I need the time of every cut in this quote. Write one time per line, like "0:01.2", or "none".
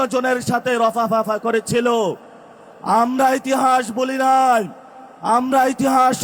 none

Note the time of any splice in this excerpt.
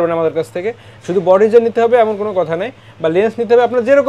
none

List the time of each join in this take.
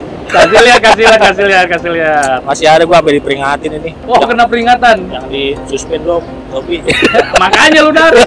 none

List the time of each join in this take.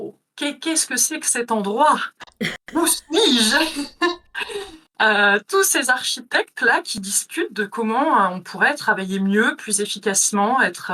none

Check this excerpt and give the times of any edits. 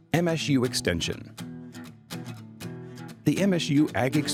none

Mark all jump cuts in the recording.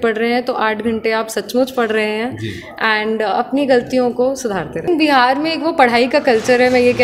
none

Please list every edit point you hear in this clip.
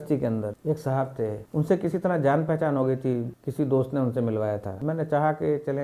none

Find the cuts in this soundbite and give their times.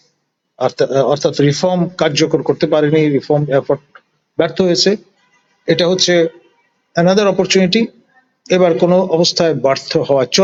none

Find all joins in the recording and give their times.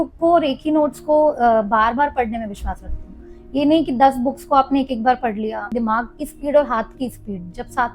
0:05.6

